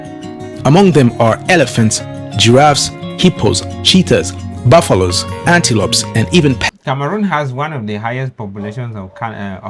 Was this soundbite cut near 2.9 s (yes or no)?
no